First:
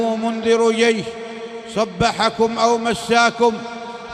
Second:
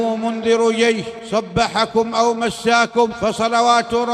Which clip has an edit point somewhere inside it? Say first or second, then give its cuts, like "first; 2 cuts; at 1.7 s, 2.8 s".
second; 2 cuts; at 1.1 s, 3.2 s